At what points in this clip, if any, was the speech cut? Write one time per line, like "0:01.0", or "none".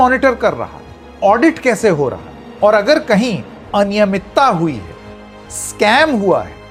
none